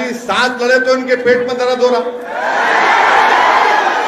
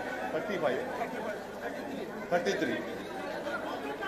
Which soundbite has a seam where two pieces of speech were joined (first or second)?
second